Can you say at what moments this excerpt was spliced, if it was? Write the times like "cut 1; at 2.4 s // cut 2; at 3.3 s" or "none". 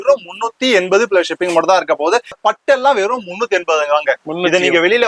cut 1; at 2.4 s

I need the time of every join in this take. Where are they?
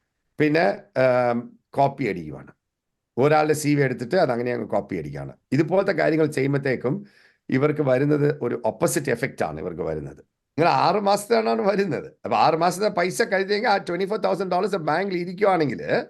cut 1; at 10.6 s

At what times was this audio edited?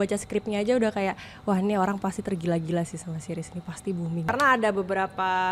cut 1; at 4.3 s

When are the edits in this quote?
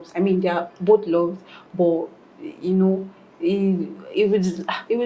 none

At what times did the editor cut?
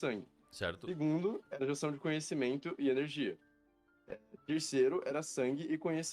cut 1; at 2.7 s

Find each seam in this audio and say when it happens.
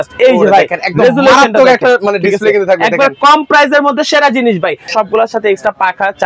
cut 1; at 4.9 s

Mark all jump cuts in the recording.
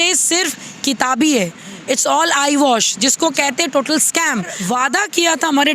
cut 1; at 4.6 s

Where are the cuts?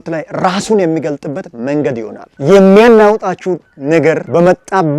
cut 1; at 2.3 s

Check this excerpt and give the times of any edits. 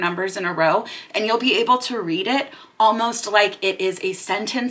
none

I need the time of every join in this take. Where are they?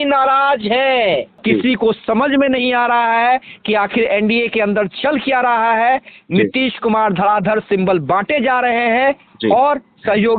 cut 1; at 1.3 s

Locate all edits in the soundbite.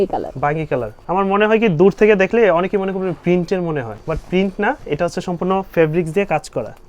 cut 1; at 1.0 s // cut 2; at 3.9 s

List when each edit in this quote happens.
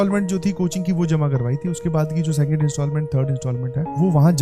none

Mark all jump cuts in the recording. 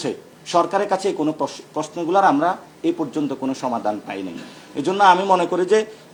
none

